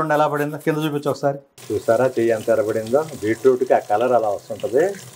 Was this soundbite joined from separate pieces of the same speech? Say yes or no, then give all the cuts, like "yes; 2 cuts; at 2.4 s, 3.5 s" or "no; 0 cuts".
yes; 1 cut; at 1.5 s